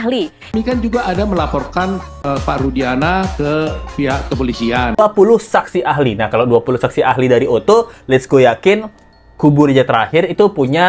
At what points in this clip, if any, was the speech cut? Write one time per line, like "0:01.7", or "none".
0:05.0

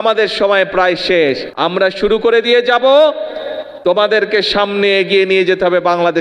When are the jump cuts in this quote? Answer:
0:01.5

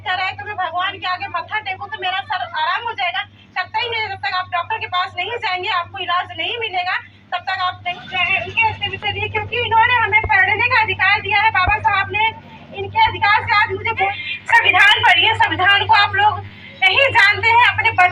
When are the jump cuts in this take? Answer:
0:07.9
0:14.1

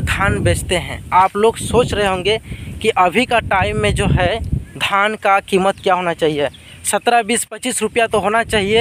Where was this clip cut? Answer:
none

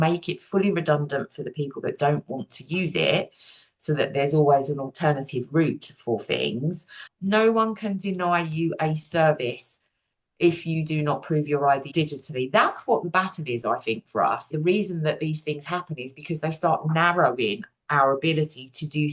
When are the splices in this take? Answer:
0:07.1
0:11.9
0:14.5

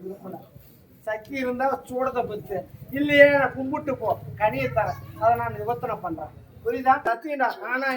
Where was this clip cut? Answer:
0:07.0

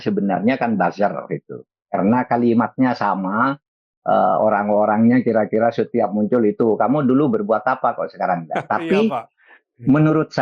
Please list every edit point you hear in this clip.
none

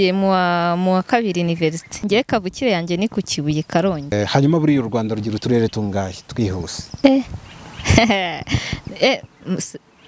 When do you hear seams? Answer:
0:02.0
0:04.1
0:06.8

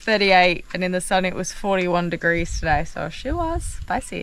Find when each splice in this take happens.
none

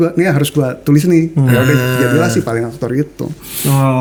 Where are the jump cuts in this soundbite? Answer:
none

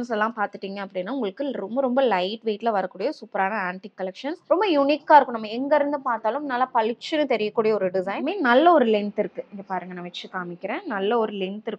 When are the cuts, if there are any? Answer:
0:04.4
0:08.2

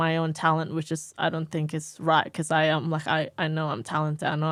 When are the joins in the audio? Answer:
none

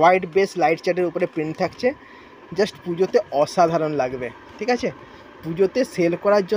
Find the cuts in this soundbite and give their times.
none

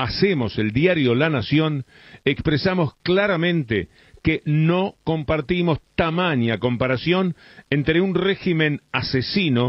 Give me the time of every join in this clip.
none

